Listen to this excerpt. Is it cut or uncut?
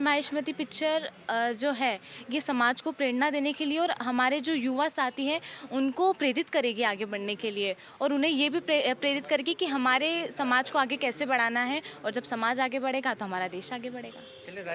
uncut